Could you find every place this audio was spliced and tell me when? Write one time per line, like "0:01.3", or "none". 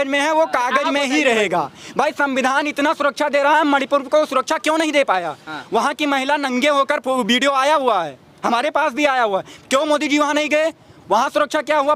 none